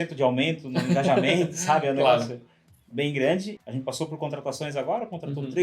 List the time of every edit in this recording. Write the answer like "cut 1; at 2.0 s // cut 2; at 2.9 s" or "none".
cut 1; at 3.6 s